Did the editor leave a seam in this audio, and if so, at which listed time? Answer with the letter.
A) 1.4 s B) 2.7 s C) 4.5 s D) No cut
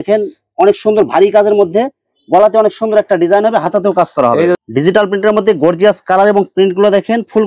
C